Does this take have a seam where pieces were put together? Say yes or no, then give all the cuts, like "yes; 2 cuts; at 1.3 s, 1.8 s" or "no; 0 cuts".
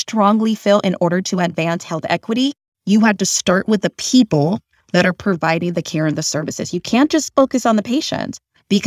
no; 0 cuts